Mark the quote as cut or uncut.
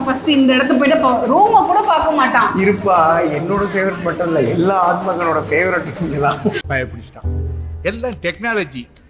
uncut